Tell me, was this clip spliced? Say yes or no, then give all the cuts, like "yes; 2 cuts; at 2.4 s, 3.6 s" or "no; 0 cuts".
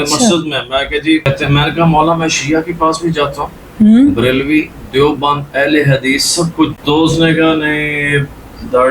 yes; 2 cuts; at 1.2 s, 6.8 s